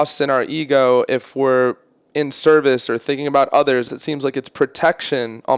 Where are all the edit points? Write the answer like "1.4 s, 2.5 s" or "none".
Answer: 3.9 s